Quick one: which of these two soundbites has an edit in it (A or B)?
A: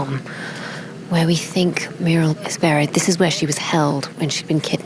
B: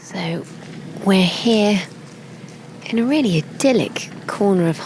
A